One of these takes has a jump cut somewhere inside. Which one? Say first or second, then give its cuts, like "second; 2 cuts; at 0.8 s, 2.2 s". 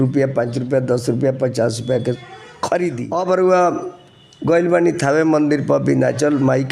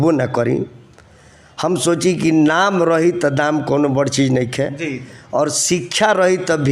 first; 1 cut; at 3.0 s